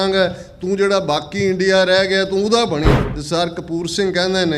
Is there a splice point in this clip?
yes; 1 cut; at 3.1 s

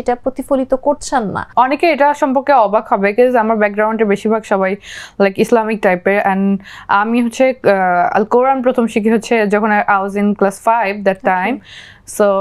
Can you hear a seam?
no; 0 cuts

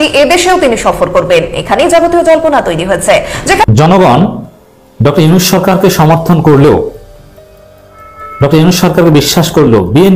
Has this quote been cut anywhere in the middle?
yes; 1 cut; at 3.7 s

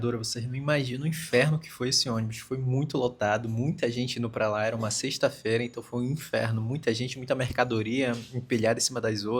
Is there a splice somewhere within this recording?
no; 0 cuts

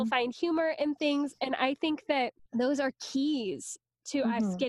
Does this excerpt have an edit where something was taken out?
no; 0 cuts

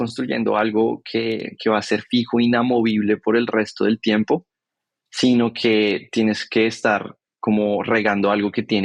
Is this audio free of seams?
yes; 0 cuts

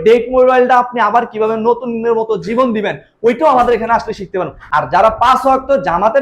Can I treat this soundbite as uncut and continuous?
no; 1 cut; at 4.6 s

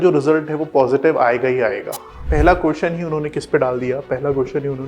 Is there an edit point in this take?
yes; 1 cut; at 2.2 s

